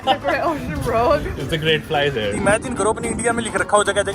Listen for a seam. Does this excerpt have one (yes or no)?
yes